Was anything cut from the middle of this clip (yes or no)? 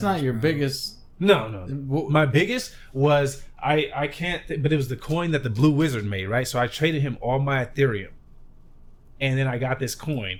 no